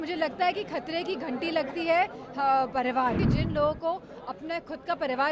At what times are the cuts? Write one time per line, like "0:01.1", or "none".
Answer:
0:03.3